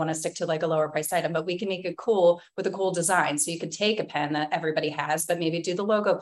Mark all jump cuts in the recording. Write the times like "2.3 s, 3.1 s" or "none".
none